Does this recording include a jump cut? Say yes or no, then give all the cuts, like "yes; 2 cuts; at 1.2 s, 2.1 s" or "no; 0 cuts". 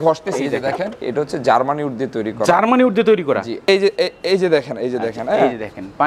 yes; 2 cuts; at 1.0 s, 3.5 s